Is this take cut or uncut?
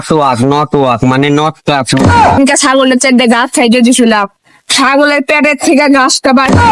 cut